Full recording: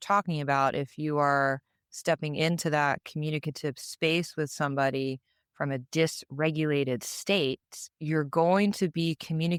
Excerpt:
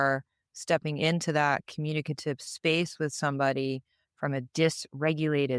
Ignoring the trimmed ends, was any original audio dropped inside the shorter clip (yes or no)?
no